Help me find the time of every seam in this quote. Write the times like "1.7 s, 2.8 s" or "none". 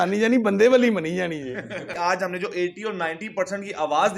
1.9 s